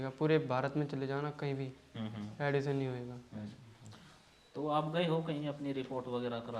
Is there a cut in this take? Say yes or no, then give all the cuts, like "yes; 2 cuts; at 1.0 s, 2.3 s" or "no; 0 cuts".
no; 0 cuts